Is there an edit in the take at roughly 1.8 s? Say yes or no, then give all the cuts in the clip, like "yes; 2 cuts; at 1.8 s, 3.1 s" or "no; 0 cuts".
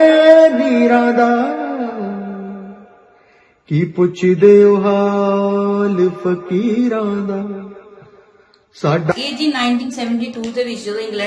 no; 1 cut; at 9.1 s